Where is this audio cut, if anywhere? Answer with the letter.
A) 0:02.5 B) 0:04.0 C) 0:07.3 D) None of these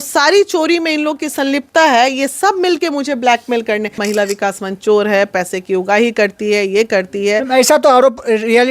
B